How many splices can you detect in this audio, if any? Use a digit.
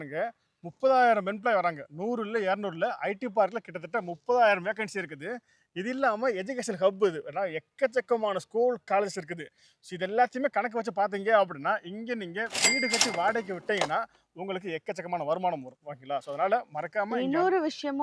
0